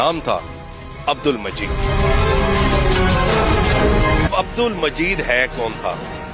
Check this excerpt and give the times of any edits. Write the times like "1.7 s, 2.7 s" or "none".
4.3 s